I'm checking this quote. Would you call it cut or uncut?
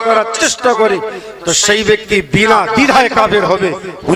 uncut